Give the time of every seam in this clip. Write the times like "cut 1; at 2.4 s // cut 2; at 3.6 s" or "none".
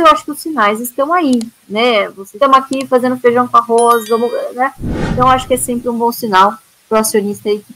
cut 1; at 2.2 s